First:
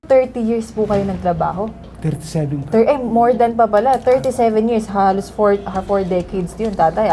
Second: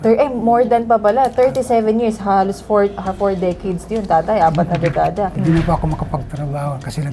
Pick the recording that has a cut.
second; 1 cut; at 5.4 s

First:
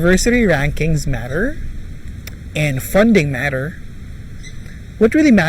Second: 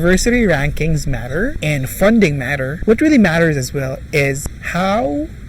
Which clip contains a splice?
second; 3 cuts; at 1.6 s, 2.7 s, 4.5 s

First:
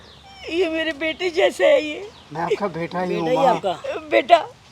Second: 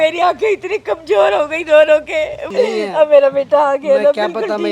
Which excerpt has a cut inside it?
second; 1 cut; at 2.4 s

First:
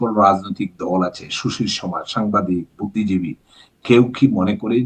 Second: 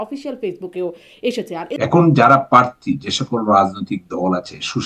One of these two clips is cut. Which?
second; 1 cut; at 1.7 s

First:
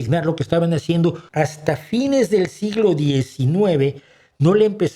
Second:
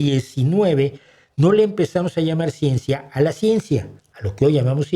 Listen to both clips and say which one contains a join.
first; 1 cut; at 1.2 s

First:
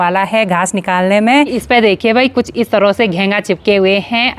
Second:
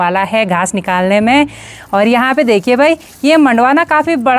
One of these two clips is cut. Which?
first; 1 cut; at 1.6 s

